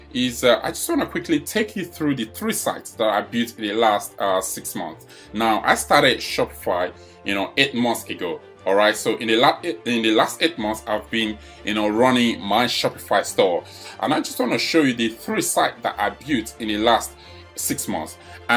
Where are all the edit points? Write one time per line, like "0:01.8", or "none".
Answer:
0:02.9